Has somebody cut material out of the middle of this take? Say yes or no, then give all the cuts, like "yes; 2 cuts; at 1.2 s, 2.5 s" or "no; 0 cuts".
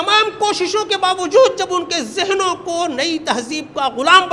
no; 0 cuts